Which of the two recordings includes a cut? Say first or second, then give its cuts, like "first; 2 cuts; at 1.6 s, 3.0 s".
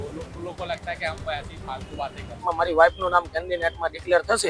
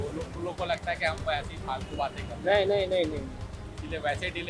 first; 1 cut; at 2.3 s